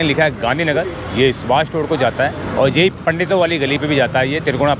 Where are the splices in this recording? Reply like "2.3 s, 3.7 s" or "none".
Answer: none

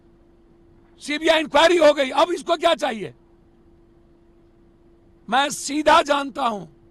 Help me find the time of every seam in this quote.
none

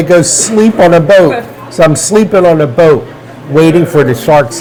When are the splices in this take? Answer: none

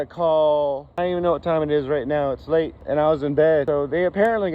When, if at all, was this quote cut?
0.9 s, 2.8 s, 3.6 s

